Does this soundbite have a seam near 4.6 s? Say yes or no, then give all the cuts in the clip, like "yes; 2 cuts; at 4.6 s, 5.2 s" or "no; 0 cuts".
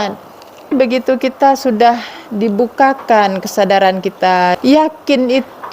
yes; 2 cuts; at 0.7 s, 4.6 s